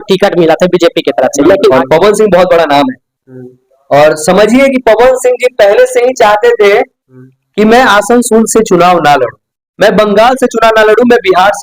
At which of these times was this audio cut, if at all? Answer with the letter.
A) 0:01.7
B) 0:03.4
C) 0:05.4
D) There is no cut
A